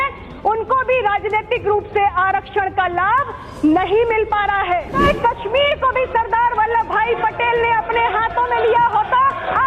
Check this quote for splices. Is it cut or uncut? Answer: cut